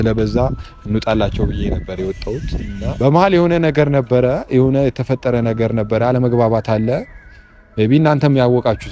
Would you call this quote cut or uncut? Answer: cut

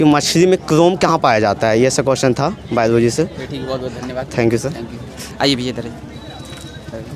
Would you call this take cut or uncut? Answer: uncut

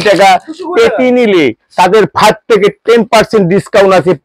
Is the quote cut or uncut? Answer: uncut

